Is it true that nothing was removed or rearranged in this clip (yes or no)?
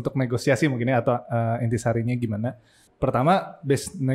no